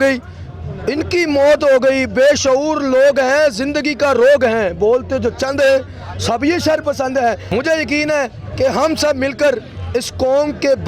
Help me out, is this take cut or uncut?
cut